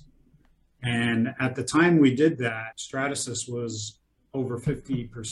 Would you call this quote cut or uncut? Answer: cut